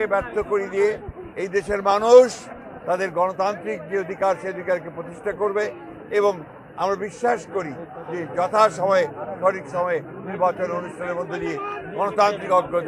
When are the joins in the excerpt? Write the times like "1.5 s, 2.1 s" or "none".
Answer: none